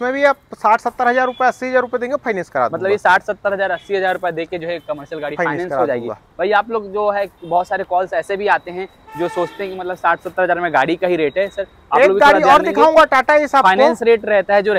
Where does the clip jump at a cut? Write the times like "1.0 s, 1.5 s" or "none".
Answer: none